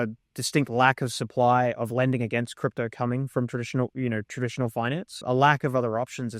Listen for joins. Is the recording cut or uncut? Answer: cut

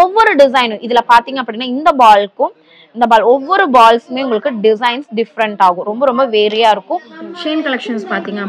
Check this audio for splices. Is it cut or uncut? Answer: cut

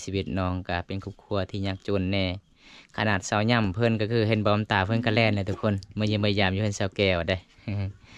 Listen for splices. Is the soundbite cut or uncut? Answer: uncut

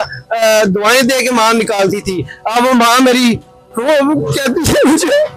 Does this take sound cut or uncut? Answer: uncut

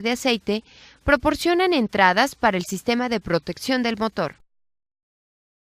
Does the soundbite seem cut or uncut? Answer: cut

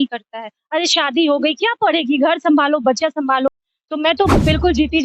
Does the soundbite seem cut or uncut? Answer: cut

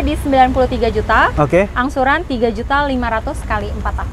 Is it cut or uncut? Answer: uncut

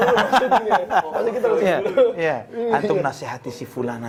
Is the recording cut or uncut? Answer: uncut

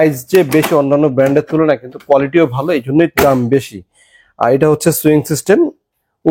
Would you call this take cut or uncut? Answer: uncut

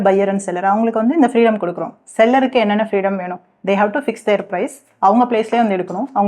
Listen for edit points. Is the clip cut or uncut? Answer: uncut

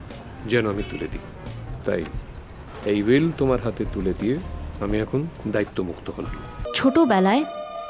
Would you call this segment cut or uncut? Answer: cut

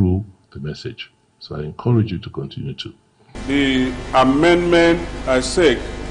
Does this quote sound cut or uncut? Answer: cut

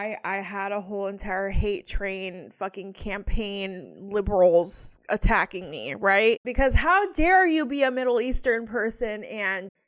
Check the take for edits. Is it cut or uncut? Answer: uncut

